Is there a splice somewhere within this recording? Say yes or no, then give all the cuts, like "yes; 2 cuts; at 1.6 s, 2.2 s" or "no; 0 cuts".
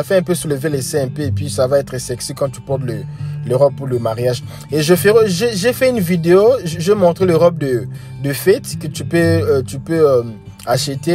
no; 0 cuts